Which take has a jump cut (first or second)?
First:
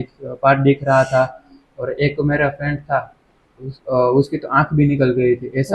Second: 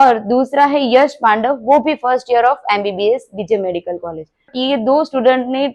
second